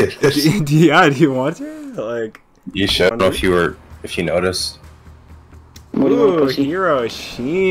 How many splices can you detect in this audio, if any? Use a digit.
1